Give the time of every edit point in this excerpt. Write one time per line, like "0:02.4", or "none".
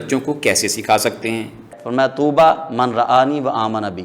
0:01.7